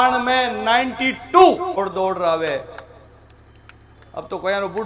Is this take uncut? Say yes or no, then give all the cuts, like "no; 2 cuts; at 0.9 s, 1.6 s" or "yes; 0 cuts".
no; 1 cut; at 1.8 s